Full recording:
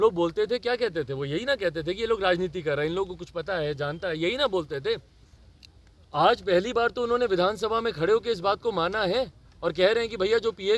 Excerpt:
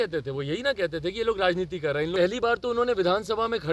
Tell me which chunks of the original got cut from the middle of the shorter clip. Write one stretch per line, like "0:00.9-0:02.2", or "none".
0:03.0-0:06.5